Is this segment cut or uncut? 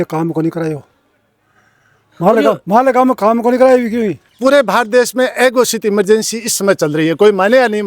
cut